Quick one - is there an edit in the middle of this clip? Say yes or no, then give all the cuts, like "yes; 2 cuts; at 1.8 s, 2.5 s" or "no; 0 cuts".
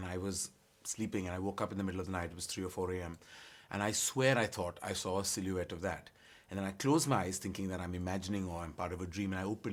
no; 0 cuts